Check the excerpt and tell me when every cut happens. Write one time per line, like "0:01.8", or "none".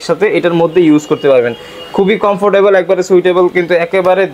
none